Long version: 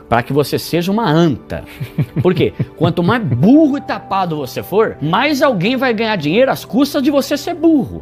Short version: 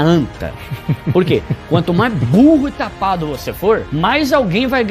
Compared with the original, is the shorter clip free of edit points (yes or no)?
yes